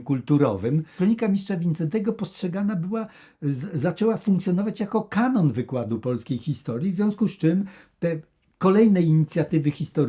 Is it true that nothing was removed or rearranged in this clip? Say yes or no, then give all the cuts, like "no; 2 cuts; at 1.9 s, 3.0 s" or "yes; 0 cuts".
no; 1 cut; at 1.0 s